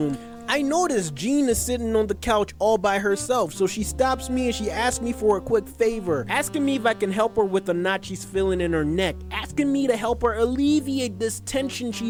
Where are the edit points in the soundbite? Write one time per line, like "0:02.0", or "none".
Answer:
none